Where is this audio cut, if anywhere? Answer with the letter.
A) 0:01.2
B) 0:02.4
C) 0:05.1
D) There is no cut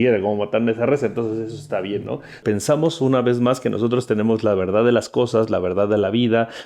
B